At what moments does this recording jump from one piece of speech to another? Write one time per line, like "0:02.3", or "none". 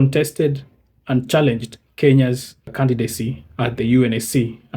0:02.7